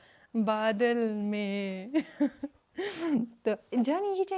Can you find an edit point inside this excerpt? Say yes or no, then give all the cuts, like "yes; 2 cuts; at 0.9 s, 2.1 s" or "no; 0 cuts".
no; 0 cuts